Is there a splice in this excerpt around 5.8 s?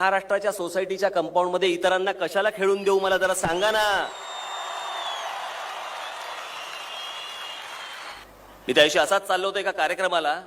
no; 1 cut; at 8.2 s

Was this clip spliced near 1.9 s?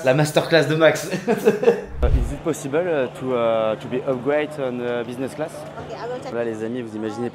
yes; 2 cuts; at 1.9 s, 6.3 s

